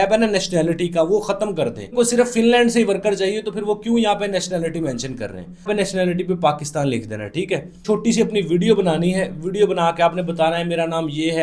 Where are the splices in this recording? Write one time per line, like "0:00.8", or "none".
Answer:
0:01.9
0:05.7
0:07.8